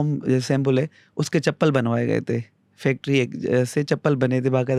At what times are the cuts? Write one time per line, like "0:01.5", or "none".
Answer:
none